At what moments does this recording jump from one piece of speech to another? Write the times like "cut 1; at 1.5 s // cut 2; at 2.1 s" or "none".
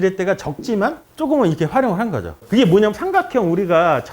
cut 1; at 2.3 s